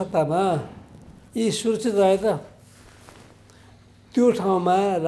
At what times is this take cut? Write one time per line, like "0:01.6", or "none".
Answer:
none